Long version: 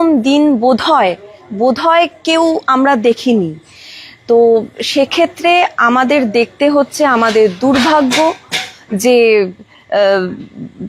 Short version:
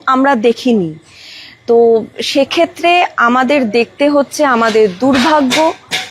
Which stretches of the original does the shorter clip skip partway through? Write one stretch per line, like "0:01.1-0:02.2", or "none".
none